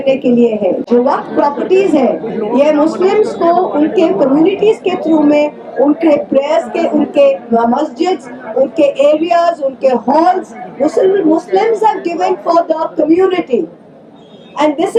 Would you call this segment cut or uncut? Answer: uncut